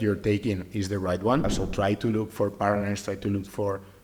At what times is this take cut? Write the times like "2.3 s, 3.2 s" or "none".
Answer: 1.4 s